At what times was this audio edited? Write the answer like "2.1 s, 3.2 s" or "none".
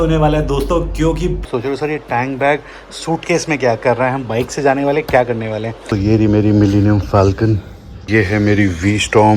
1.5 s, 5.8 s, 8.0 s